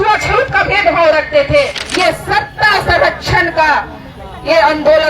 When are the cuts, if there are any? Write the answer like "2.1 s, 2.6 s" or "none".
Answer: 1.8 s